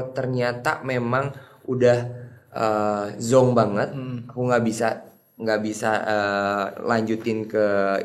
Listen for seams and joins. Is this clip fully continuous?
yes; 0 cuts

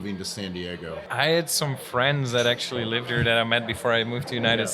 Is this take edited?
yes; 1 cut; at 1.1 s

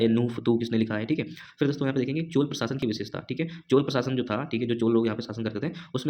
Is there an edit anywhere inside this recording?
no; 0 cuts

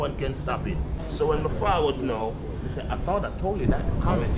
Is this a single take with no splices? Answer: no; 1 cut; at 1.0 s

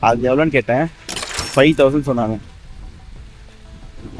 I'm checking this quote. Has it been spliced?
no; 0 cuts

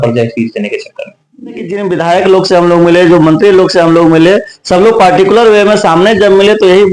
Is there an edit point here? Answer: yes; 1 cut; at 1.7 s

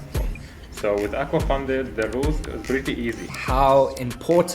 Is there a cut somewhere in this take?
yes; 1 cut; at 3.3 s

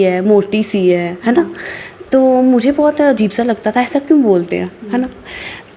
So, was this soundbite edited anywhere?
no; 0 cuts

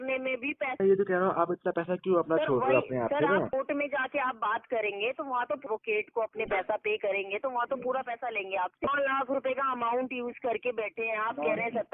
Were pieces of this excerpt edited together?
yes; 4 cuts; at 0.8 s, 3.5 s, 5.6 s, 8.9 s

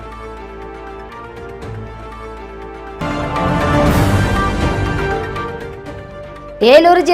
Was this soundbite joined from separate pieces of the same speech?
yes; 2 cuts; at 1.0 s, 2.9 s

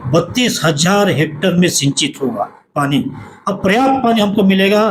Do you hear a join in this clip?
no; 0 cuts

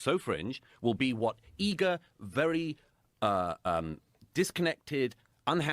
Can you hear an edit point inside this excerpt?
yes; 1 cut; at 2.2 s

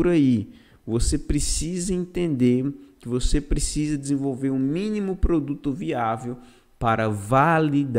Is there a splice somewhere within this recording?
no; 0 cuts

